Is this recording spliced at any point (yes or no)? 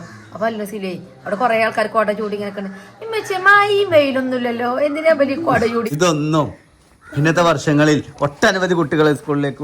yes